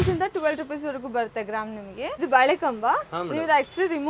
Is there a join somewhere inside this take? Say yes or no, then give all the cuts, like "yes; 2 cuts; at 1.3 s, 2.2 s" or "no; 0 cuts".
yes; 1 cut; at 2.2 s